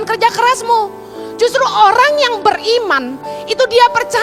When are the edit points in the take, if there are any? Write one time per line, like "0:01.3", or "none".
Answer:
none

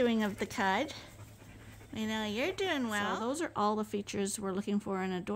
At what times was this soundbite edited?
0:03.1

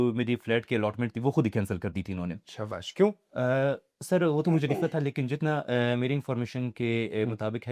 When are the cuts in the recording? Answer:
none

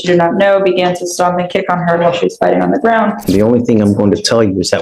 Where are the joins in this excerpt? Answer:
0:03.3

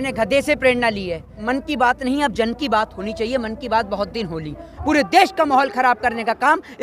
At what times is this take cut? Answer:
0:01.4
0:04.7

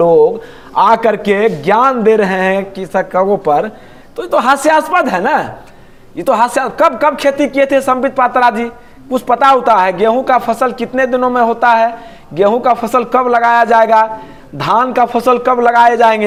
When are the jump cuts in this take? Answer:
none

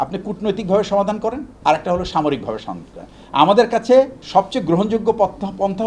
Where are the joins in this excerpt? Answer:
0:01.5
0:04.2

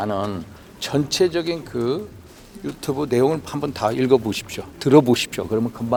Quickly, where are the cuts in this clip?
none

